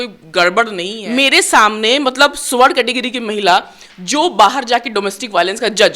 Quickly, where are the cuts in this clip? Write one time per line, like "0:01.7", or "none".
0:01.0

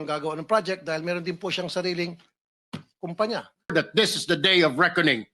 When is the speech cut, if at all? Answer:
0:03.7

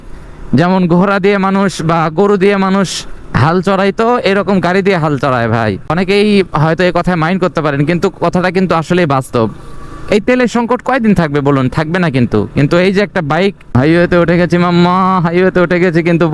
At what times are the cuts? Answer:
0:13.7

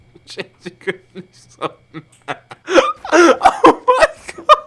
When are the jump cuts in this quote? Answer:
0:02.5

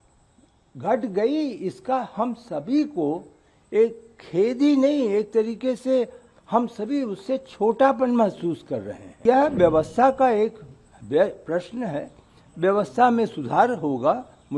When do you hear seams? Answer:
0:09.2

